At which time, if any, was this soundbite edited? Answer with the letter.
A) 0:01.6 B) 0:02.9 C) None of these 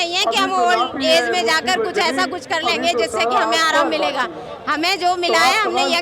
C